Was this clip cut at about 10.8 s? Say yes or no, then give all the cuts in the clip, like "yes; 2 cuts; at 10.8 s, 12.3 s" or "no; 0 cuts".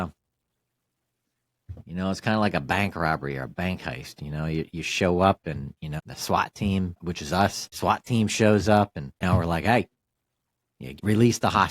yes; 1 cut; at 10.8 s